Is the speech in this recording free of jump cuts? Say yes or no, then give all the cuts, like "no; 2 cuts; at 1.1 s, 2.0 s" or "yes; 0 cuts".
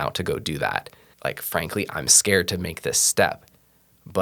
no; 1 cut; at 1.0 s